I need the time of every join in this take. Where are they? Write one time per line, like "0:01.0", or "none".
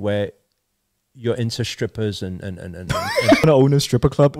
0:03.4